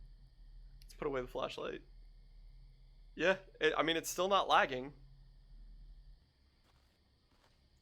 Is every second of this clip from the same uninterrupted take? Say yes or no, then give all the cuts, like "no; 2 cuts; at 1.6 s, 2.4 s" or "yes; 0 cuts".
no; 1 cut; at 6.2 s